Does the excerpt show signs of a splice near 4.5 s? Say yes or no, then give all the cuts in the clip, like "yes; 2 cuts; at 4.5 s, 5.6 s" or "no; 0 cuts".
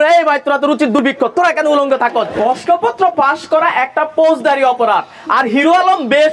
no; 2 cuts; at 1.0 s, 2.3 s